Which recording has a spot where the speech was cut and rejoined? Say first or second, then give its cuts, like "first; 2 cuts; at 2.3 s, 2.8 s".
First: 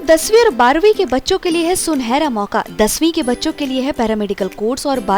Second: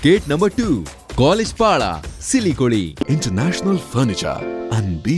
second; 1 cut; at 3.0 s